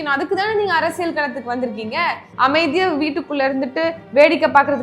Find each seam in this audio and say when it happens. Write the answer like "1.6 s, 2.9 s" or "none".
2.3 s